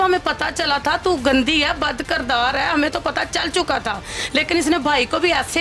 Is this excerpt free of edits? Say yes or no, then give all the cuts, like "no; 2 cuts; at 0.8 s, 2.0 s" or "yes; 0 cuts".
yes; 0 cuts